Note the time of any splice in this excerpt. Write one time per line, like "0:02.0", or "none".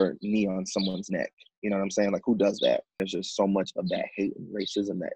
0:03.0